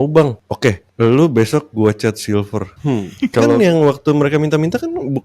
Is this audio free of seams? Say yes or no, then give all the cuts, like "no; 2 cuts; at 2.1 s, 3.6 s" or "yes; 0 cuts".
no; 1 cut; at 3.2 s